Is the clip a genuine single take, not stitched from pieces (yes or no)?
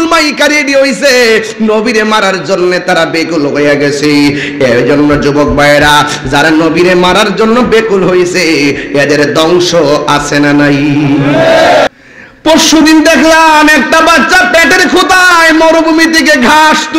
no